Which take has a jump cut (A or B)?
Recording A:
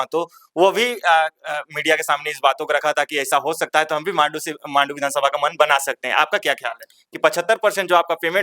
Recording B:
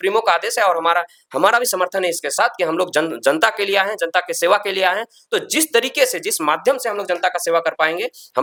A